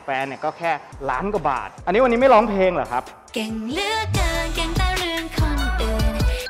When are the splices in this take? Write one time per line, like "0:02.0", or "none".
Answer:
0:01.6